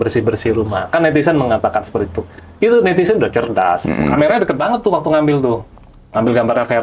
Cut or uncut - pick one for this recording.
cut